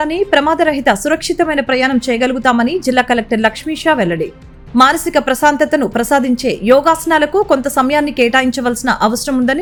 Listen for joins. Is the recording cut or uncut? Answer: uncut